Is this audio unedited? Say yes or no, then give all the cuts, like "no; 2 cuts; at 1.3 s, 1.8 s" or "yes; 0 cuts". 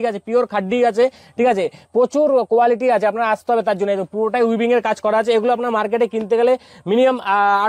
yes; 0 cuts